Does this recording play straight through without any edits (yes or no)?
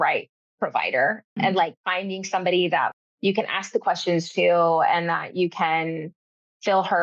no